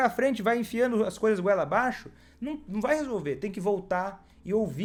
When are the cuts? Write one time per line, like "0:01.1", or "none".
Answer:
none